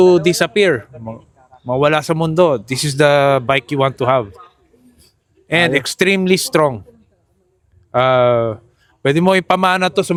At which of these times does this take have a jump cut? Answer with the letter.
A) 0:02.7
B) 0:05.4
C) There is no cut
C